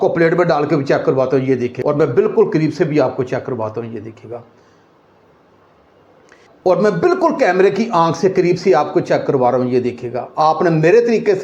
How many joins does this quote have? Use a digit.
2